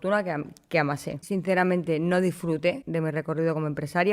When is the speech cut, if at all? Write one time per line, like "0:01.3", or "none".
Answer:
0:01.1
0:02.8